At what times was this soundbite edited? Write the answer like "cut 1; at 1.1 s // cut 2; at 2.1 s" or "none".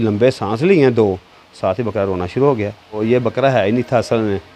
cut 1; at 3.0 s